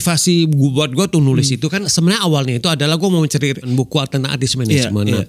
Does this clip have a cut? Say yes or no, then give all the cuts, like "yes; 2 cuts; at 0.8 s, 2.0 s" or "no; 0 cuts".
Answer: yes; 2 cuts; at 1.9 s, 3.7 s